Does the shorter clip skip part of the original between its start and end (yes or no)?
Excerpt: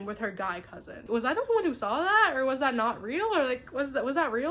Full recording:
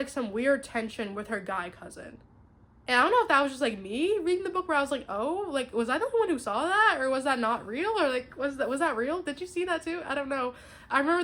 yes